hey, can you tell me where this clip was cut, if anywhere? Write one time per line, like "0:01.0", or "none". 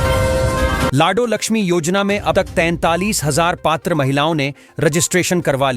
0:00.9